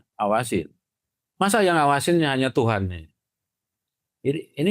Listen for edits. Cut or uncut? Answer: uncut